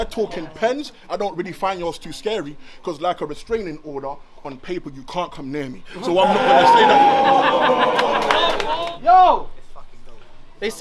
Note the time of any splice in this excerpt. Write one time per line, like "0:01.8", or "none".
0:08.7